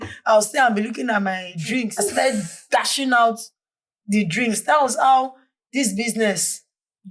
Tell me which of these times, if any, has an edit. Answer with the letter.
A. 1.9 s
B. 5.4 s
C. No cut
A